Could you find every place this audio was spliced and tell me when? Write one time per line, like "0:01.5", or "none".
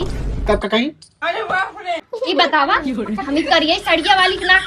0:02.1